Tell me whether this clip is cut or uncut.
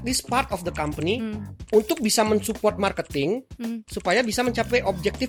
uncut